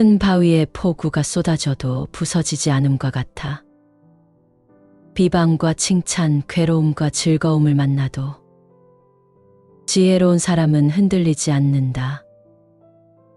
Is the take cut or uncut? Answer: cut